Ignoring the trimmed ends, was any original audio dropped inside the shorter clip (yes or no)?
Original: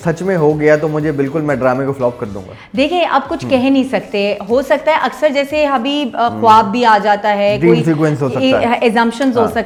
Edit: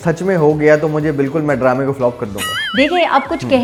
no